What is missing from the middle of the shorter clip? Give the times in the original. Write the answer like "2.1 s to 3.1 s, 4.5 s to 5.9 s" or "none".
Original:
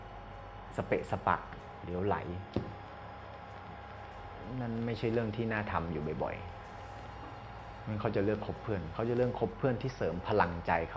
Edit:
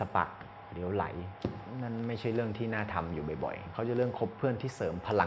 2.7 s to 4.4 s, 6.5 s to 8.9 s